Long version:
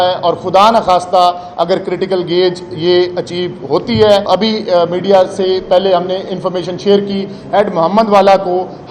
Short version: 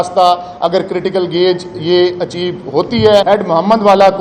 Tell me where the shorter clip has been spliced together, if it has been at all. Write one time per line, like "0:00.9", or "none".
0:03.2

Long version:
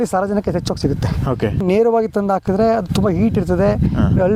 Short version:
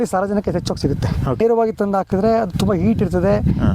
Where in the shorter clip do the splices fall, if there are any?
0:01.4

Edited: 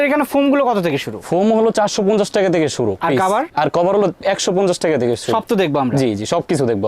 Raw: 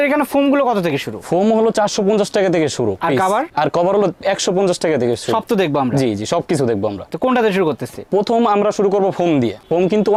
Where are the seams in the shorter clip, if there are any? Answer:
none

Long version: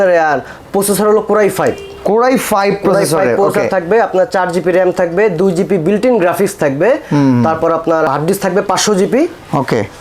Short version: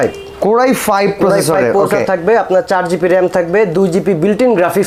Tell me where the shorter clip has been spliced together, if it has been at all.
none

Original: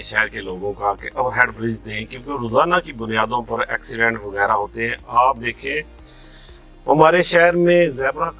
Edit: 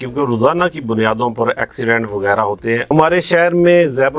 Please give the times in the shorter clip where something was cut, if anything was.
0:02.9

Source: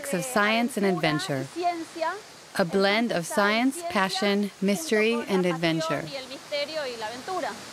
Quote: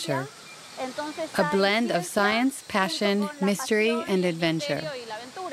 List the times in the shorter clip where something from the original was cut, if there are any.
0:04.6

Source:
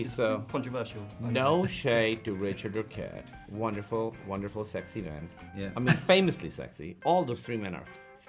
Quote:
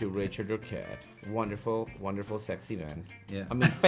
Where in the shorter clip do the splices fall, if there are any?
none

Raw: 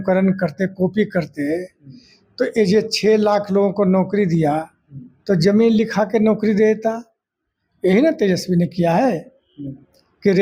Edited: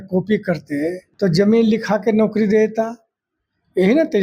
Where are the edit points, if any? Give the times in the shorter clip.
0:01.1

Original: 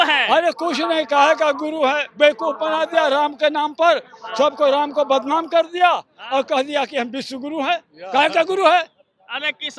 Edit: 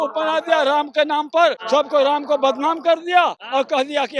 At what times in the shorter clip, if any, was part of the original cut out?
0:01.6
0:03.4

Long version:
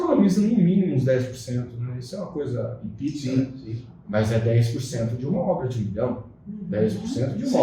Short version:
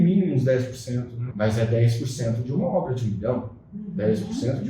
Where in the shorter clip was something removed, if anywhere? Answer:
0:01.2

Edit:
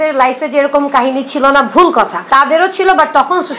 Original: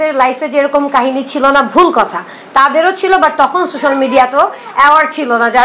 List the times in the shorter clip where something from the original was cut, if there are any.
0:02.2

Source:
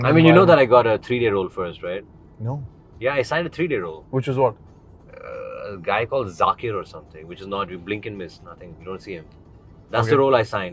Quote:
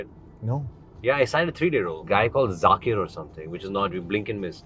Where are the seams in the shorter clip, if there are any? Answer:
0:02.0

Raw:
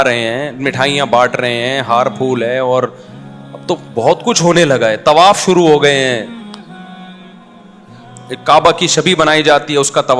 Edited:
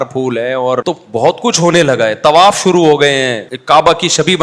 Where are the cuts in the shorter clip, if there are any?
0:01.4
0:03.5

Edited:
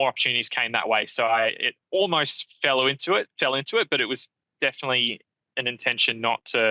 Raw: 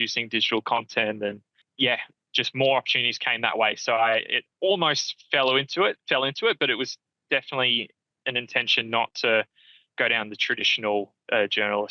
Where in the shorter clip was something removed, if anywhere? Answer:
none

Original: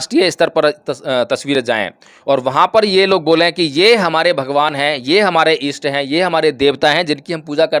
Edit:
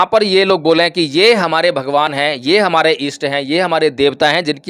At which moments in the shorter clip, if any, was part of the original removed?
none

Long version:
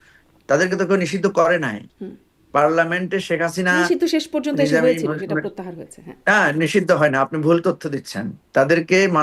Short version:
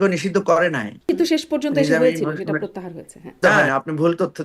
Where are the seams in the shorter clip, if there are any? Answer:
0:01.1
0:03.4

